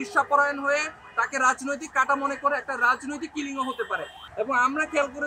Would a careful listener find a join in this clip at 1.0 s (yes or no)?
no